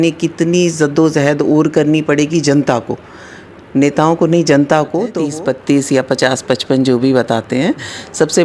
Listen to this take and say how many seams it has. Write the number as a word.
one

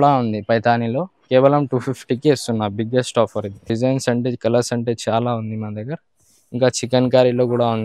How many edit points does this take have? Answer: one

